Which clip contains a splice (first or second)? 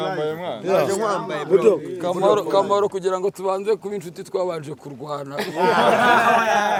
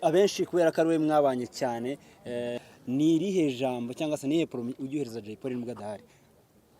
second